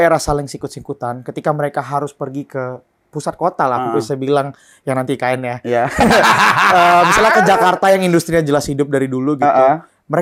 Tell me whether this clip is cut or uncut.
uncut